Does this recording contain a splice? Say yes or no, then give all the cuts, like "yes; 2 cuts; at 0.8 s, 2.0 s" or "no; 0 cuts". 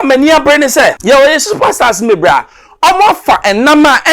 yes; 1 cut; at 1.0 s